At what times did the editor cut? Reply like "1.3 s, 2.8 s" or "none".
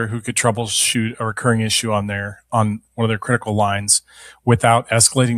none